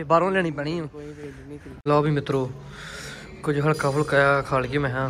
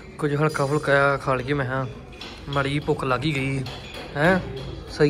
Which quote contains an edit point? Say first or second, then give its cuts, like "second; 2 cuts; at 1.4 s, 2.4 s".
first; 1 cut; at 1.8 s